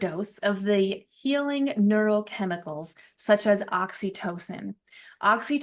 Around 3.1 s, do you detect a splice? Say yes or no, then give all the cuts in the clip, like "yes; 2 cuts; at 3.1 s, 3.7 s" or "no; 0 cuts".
no; 0 cuts